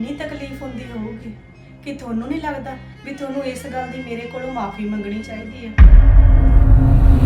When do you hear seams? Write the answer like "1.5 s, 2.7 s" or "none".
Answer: 5.7 s